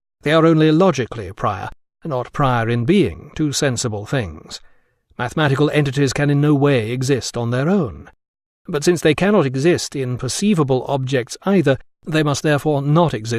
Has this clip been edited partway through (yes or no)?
no